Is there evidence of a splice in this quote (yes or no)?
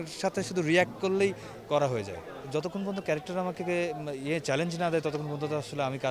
yes